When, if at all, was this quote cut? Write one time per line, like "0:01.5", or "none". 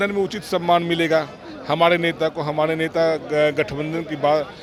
none